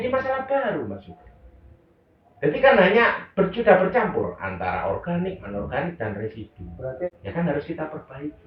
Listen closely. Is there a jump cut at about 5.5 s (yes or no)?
no